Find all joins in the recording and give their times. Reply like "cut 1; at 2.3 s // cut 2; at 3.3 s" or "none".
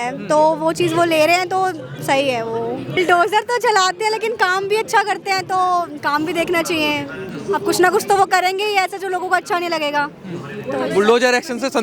cut 1; at 3.0 s